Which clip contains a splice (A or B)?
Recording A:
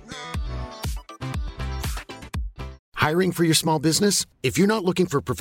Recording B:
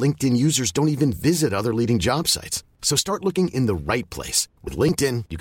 A